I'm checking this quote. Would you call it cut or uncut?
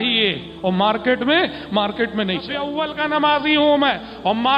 cut